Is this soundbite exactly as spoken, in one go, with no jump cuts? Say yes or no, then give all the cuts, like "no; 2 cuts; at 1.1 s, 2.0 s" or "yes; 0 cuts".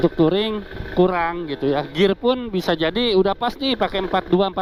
yes; 0 cuts